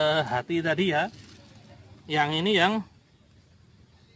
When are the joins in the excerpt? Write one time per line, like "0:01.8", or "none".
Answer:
none

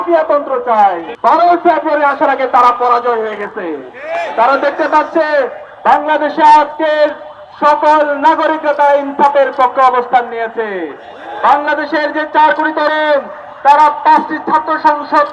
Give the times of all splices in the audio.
0:01.1

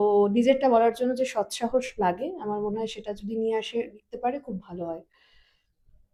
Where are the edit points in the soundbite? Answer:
none

